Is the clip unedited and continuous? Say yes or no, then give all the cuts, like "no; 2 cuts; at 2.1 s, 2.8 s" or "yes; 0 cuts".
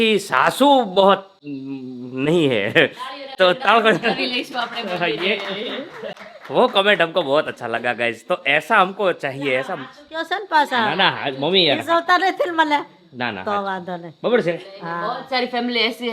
yes; 0 cuts